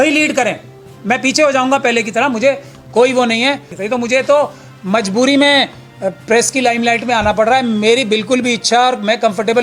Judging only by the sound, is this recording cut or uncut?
uncut